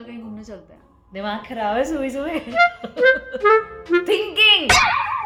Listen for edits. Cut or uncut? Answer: uncut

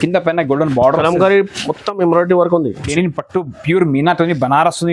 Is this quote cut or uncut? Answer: cut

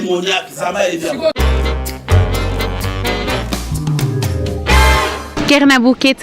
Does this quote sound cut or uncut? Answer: cut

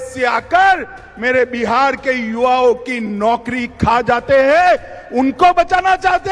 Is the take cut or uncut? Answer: uncut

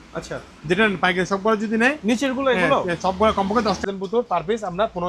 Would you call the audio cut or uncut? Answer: cut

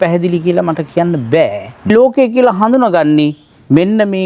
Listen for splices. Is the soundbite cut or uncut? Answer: cut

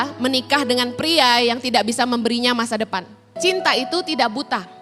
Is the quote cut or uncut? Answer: cut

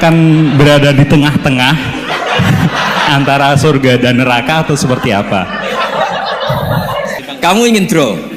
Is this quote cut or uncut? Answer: cut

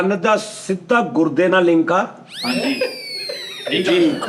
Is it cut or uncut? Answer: uncut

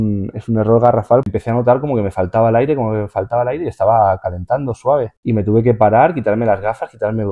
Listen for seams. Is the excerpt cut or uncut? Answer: cut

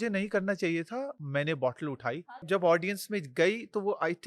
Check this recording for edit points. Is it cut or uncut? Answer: cut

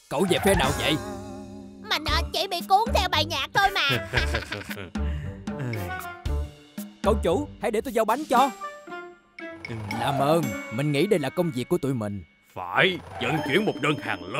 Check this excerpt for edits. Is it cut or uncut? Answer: uncut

